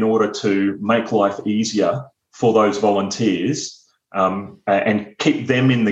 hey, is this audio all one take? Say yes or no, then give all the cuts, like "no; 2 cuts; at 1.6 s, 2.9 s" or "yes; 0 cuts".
yes; 0 cuts